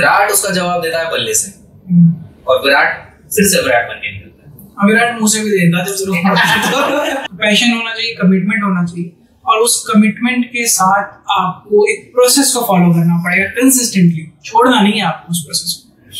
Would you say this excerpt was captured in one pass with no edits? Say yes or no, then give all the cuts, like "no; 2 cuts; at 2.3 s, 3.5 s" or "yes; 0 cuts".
no; 1 cut; at 7.2 s